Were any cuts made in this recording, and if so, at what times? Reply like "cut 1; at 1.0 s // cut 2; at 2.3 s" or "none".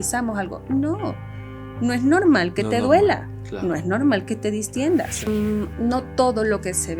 cut 1; at 5.3 s